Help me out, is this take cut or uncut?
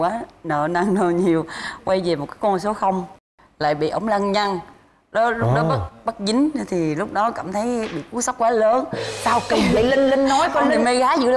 cut